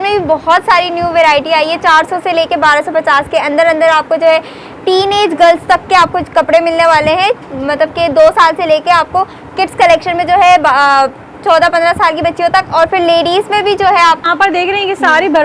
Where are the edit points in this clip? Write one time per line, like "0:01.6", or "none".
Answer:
0:14.2